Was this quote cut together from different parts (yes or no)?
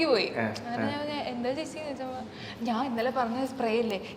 no